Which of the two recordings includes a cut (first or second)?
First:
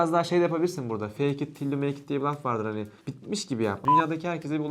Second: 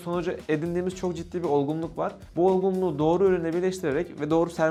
first